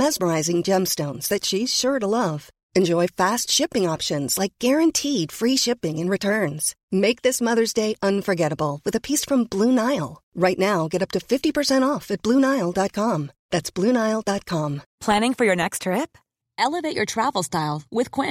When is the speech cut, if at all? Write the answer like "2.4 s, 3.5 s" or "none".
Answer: 14.9 s